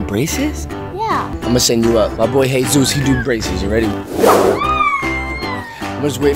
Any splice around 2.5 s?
no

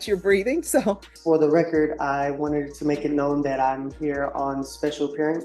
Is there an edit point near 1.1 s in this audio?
yes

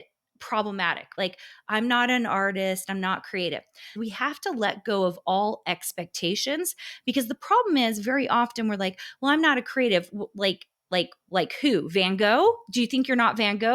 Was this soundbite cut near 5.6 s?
no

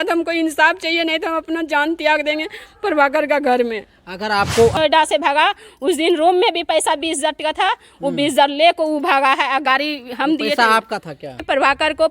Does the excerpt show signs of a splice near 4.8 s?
yes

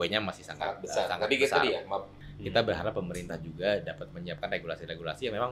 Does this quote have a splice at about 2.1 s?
yes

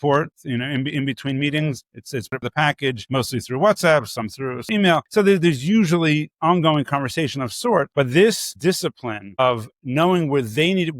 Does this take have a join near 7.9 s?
yes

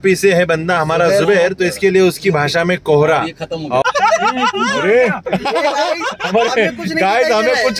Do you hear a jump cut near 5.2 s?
no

